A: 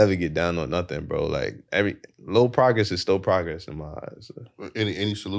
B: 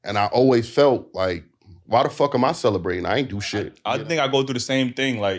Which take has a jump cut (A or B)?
B